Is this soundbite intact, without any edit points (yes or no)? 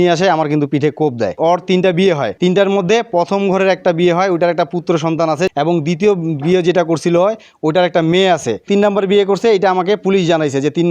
no